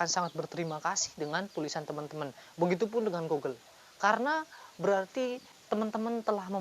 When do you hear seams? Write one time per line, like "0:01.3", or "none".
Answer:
0:05.5